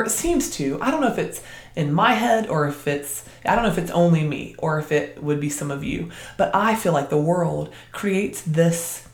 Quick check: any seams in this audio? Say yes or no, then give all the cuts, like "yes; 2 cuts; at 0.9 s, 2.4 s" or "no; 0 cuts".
no; 0 cuts